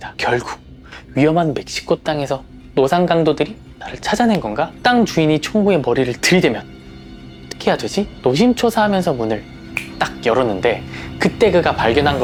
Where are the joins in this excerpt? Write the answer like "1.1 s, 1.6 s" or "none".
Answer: none